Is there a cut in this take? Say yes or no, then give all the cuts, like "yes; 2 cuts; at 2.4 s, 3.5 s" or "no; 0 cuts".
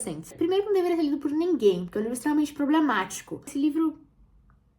yes; 1 cut; at 3.5 s